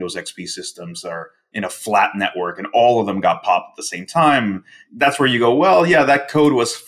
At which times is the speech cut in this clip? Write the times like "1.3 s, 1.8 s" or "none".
none